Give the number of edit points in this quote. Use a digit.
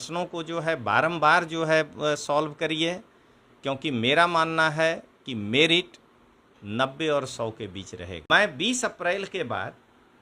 1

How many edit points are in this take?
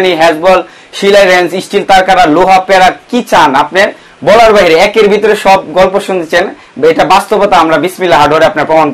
0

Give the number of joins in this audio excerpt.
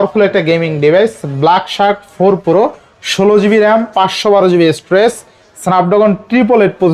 0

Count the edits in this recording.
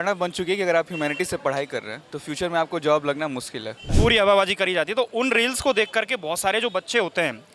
1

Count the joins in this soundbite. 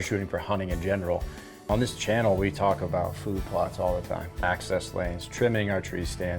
2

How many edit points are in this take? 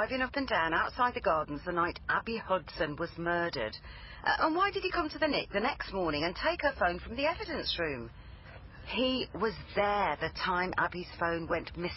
0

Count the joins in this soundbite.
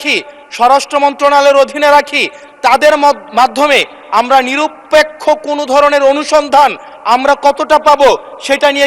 1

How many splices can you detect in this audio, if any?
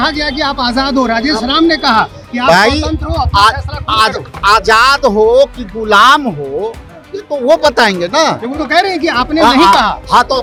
0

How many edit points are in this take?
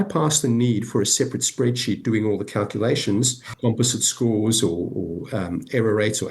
1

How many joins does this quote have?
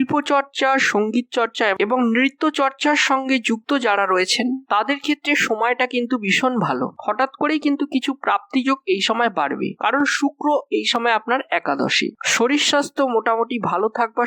1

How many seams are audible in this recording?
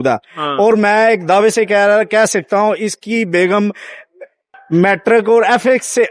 0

